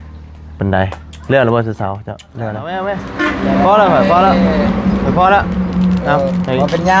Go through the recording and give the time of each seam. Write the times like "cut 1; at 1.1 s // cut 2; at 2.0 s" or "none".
cut 1; at 3.1 s